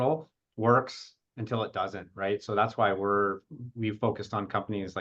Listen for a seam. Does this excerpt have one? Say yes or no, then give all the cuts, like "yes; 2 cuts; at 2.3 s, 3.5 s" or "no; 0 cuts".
no; 0 cuts